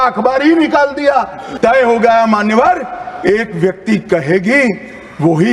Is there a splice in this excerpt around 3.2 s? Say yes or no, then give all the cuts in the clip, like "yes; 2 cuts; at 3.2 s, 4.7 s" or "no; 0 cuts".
no; 1 cut; at 1.5 s